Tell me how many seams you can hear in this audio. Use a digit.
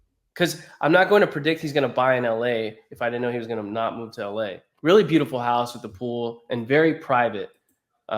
1